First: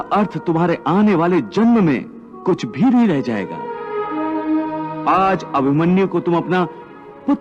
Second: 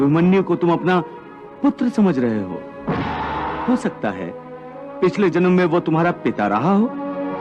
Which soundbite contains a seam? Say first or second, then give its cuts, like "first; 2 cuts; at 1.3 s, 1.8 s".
second; 1 cut; at 3.6 s